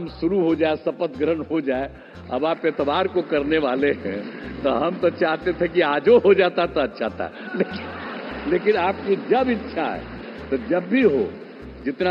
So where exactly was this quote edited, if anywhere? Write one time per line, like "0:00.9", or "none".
none